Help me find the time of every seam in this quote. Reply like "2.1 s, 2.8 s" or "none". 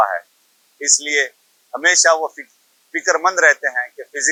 none